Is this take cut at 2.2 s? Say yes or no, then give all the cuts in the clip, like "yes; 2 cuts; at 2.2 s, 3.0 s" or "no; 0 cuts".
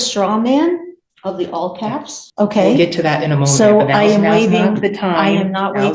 yes; 1 cut; at 2.2 s